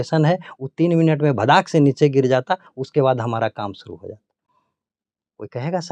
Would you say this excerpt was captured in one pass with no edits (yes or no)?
yes